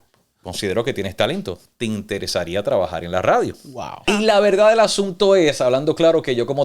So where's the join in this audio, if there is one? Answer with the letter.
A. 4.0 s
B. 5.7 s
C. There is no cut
A